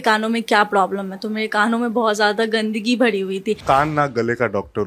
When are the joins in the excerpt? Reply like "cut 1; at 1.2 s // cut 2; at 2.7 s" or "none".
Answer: cut 1; at 3.6 s